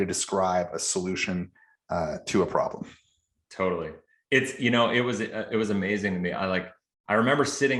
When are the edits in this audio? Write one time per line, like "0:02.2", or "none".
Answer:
none